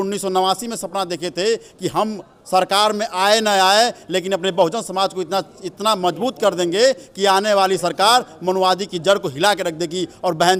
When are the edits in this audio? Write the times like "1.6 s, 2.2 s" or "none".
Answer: none